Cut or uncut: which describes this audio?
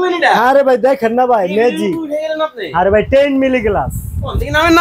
uncut